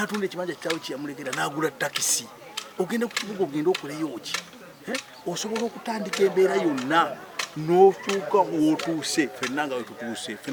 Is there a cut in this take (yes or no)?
no